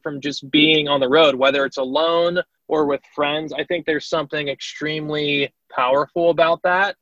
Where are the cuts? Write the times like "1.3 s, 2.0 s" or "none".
2.6 s, 5.6 s